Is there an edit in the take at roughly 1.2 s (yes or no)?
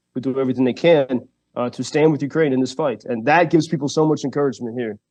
no